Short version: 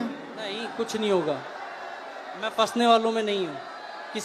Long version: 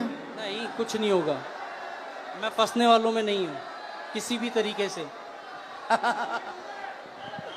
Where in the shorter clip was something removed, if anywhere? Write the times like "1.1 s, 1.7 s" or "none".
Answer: none